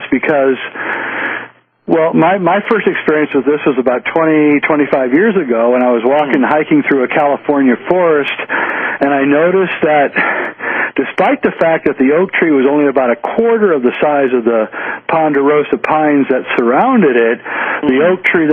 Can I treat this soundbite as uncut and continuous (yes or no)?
no